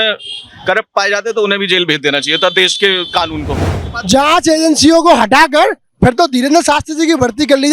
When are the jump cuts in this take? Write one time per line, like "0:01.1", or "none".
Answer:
0:03.6